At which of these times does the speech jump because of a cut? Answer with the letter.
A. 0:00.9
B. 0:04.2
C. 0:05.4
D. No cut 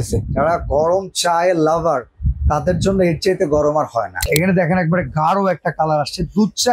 B